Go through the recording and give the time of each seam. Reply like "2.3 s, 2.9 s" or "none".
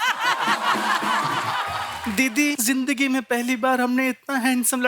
1.7 s, 2.6 s